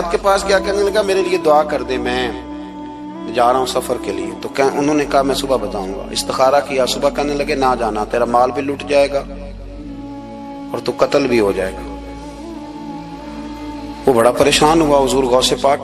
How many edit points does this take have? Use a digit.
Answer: 0